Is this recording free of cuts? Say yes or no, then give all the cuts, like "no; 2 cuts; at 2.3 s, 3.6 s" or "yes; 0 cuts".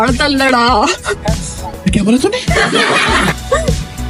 yes; 0 cuts